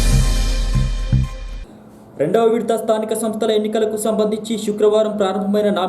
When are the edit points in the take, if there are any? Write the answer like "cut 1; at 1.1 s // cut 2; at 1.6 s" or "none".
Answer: cut 1; at 1.5 s